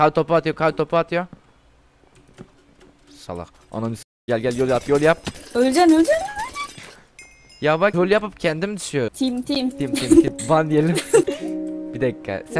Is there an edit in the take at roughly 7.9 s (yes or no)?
yes